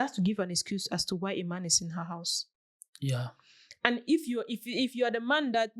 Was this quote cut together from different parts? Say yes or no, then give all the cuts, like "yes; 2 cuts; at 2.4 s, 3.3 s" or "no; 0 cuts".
no; 0 cuts